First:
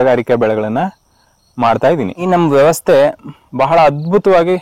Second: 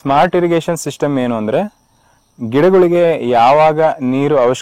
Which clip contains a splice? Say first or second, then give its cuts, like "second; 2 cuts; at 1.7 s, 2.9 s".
first; 1 cut; at 2.2 s